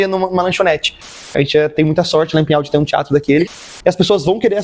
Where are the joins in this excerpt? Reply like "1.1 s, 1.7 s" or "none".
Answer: 1.2 s, 3.7 s